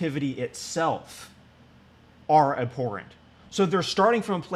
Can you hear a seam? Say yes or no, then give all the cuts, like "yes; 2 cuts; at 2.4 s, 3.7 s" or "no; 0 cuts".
no; 0 cuts